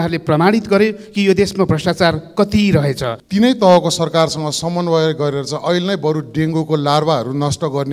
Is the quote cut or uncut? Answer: cut